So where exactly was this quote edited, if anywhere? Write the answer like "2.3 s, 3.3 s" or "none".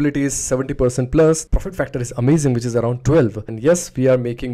1.4 s, 3.4 s